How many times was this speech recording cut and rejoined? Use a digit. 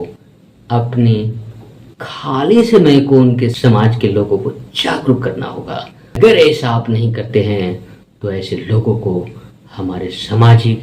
1